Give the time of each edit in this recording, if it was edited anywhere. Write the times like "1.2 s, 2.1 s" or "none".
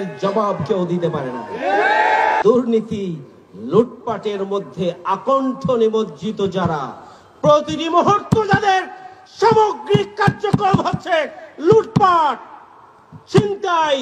2.4 s